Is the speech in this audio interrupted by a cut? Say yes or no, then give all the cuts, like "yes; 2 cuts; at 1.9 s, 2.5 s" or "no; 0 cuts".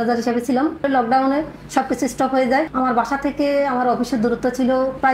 yes; 2 cuts; at 0.9 s, 2.7 s